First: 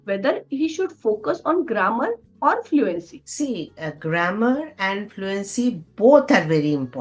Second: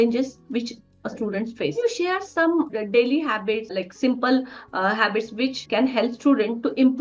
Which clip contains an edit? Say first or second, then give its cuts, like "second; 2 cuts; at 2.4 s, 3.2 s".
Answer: second; 3 cuts; at 1.7 s, 2.7 s, 3.7 s